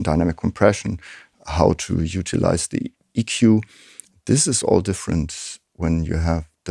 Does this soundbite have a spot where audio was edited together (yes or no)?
no